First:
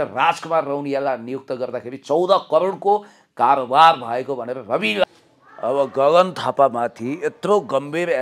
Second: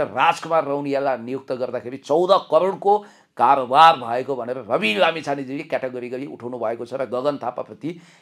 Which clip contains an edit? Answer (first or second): first